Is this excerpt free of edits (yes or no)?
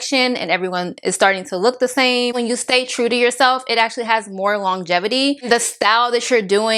no